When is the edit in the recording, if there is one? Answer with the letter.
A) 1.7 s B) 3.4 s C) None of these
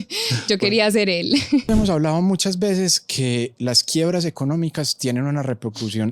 A